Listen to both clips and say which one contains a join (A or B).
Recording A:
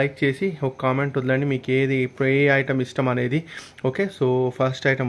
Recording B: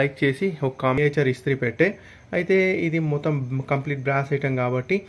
B